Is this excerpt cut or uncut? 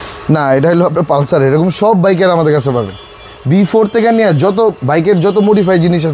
uncut